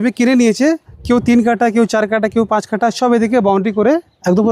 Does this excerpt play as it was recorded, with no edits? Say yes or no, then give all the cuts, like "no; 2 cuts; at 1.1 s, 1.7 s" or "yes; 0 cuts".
yes; 0 cuts